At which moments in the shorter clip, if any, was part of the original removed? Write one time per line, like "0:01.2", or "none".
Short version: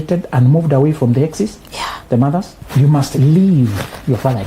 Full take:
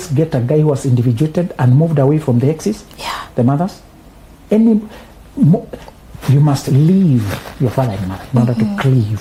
0:02.6